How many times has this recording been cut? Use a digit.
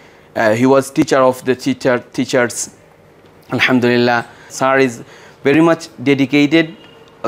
1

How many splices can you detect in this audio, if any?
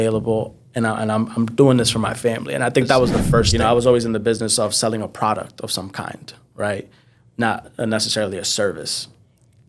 1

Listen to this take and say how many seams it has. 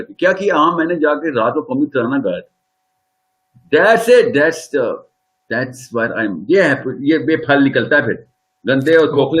0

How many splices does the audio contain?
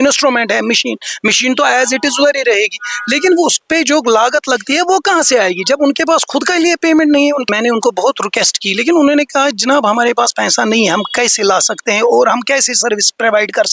1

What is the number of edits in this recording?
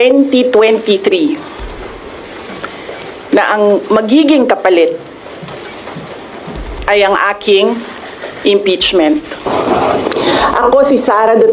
1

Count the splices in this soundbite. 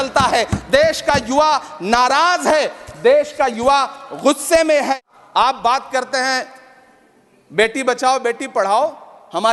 1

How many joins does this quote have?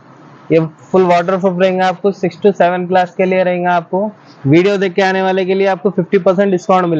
0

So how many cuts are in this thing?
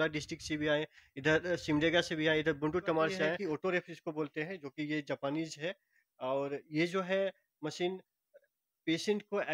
1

